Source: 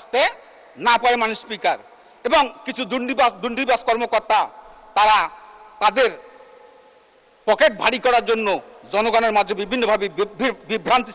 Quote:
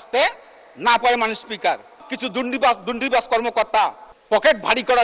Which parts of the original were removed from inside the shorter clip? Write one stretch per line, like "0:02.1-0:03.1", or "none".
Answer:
0:02.1-0:02.6
0:04.6-0:07.2